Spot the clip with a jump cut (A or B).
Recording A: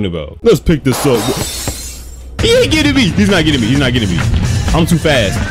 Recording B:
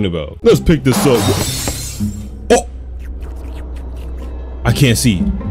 A